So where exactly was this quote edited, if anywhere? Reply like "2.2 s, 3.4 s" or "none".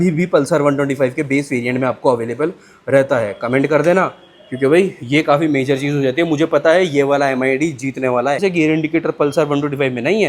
8.4 s